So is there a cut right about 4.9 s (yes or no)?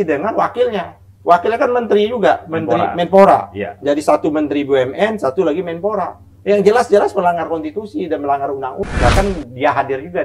no